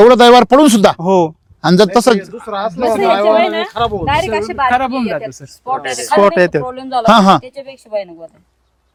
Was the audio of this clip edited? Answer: no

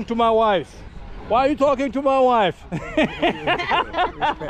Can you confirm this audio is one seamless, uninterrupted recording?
yes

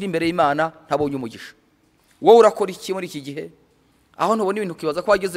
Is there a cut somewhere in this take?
no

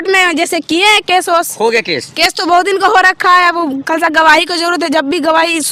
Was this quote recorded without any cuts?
yes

